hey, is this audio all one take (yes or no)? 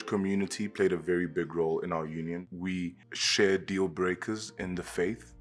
no